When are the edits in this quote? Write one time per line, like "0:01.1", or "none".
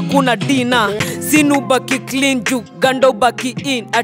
0:01.0